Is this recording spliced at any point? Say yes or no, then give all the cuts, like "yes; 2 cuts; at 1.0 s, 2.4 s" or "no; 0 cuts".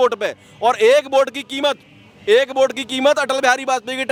no; 0 cuts